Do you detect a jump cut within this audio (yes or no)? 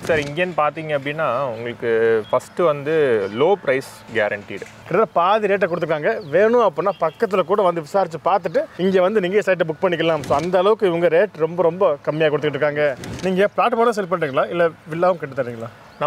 yes